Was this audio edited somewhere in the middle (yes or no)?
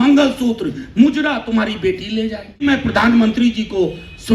yes